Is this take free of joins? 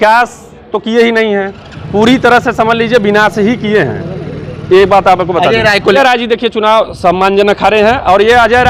no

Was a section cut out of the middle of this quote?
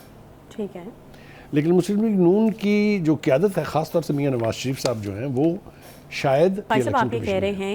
yes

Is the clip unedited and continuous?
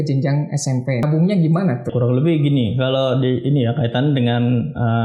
no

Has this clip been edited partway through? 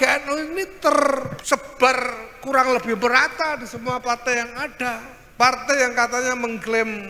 yes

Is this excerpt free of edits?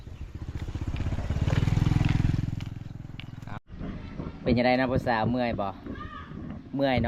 no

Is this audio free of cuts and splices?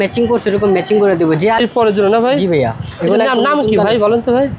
no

